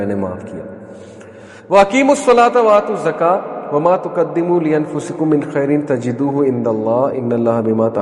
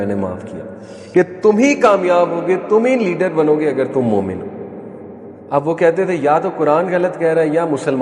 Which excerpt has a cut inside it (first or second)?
second